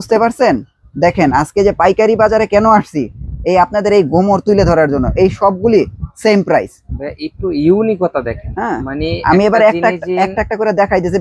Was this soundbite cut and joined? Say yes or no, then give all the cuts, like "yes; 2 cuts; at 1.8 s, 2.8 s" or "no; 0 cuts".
no; 0 cuts